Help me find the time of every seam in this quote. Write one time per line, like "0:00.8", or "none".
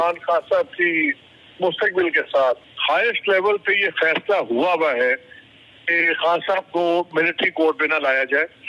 0:02.7